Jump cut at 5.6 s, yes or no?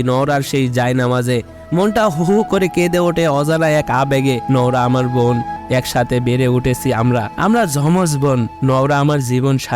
yes